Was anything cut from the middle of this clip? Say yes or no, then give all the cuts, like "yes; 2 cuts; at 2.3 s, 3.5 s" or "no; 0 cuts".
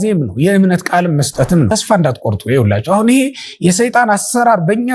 yes; 1 cut; at 1.7 s